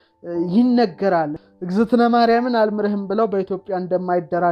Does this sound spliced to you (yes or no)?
yes